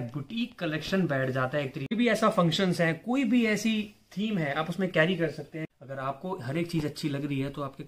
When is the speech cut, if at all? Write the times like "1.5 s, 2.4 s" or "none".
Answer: 1.9 s, 5.7 s